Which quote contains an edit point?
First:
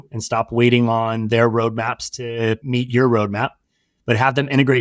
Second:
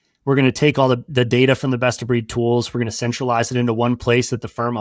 first; 1 cut; at 2.6 s

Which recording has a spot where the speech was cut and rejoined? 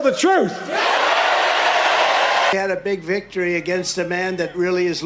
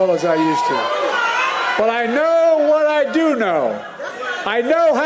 first; 1 cut; at 2.5 s

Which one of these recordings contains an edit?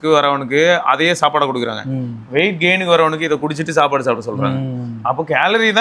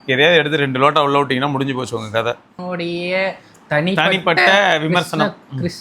second; 1 cut; at 2.7 s

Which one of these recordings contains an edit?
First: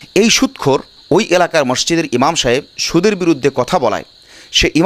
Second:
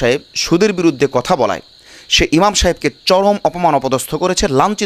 first; 1 cut; at 0.9 s

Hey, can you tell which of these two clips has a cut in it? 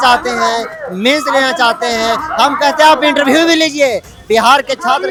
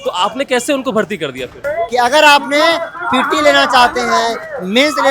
second; 1 cut; at 1.6 s

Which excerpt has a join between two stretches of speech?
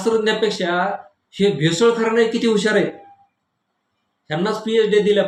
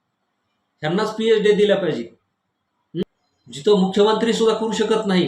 second; 1 cut; at 3.0 s

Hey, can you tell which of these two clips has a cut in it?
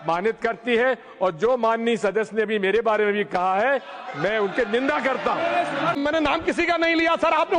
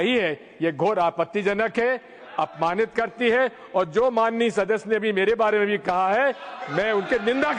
first; 1 cut; at 6.0 s

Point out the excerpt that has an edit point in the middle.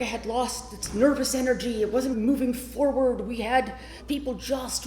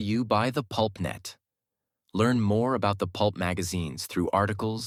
first; 2 cuts; at 2.1 s, 3.9 s

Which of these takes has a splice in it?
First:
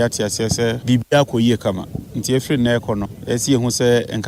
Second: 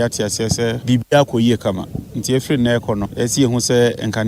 second; 1 cut; at 3.1 s

